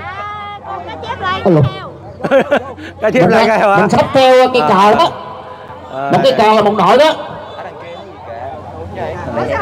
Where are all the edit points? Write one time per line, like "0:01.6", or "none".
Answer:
none